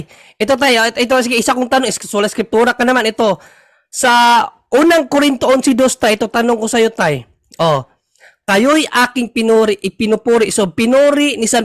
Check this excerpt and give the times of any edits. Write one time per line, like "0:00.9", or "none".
none